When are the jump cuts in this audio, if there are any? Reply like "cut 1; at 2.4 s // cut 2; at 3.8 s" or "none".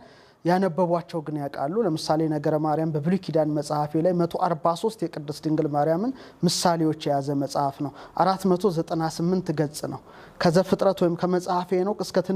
none